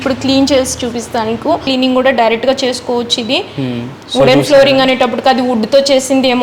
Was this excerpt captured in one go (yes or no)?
no